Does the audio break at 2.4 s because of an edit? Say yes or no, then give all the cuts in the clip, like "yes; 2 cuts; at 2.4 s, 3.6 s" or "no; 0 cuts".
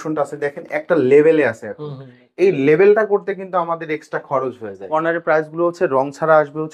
no; 1 cut; at 4.8 s